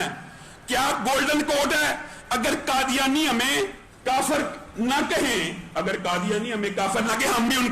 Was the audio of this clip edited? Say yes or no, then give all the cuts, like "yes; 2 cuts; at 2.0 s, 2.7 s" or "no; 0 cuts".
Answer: yes; 1 cut; at 3.9 s